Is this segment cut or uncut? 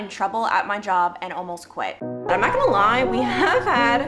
cut